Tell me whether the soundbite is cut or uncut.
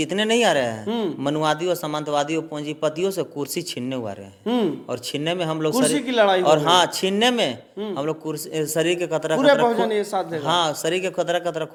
uncut